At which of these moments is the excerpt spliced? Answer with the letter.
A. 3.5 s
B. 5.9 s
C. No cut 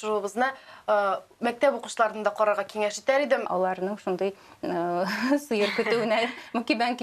A